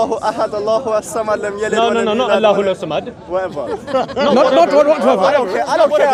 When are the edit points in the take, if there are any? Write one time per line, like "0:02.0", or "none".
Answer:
none